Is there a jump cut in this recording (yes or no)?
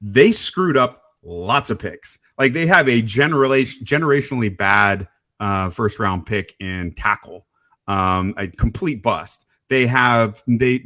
no